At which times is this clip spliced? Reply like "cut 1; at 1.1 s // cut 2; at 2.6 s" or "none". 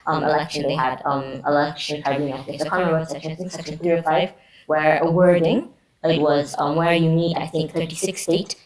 none

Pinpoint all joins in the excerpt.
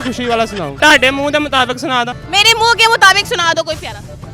cut 1; at 0.8 s // cut 2; at 2.1 s

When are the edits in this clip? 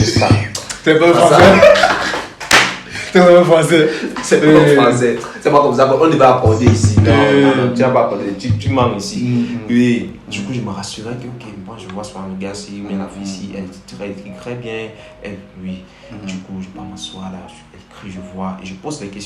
none

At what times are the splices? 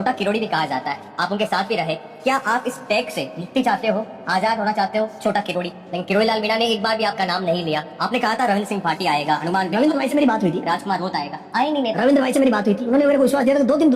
cut 1; at 5.9 s // cut 2; at 7.9 s

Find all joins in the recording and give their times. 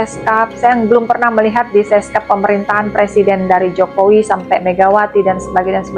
none

